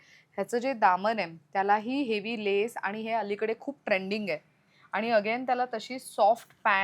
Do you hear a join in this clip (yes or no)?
no